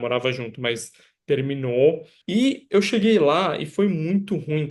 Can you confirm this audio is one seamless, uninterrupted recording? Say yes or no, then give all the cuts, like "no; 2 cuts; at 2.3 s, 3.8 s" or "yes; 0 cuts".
no; 1 cut; at 2.1 s